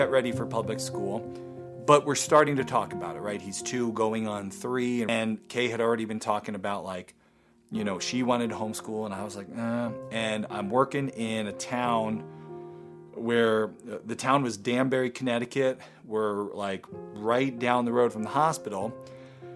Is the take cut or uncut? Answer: cut